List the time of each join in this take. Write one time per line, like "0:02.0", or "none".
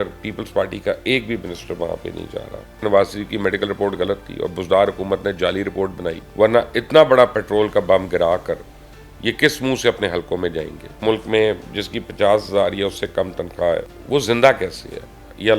0:02.8
0:06.2
0:11.0
0:13.9